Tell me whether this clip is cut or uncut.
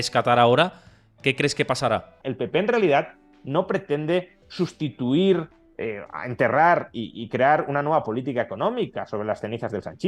cut